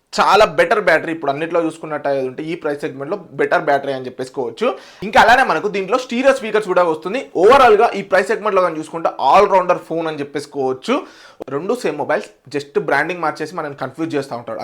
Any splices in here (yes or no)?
yes